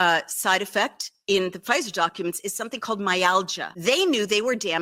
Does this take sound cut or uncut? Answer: cut